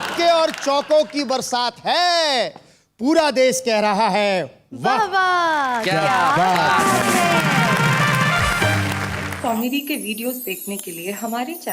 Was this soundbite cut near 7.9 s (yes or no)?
no